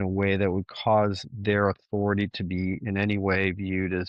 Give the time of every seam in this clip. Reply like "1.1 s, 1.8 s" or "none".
none